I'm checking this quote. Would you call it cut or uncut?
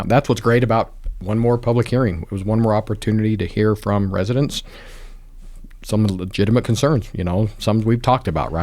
uncut